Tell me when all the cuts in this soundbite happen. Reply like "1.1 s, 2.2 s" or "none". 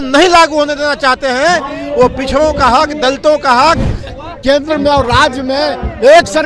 4.0 s